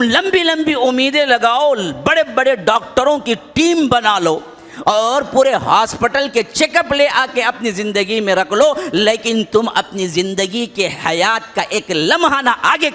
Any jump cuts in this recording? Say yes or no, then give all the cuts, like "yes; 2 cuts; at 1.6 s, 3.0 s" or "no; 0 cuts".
no; 0 cuts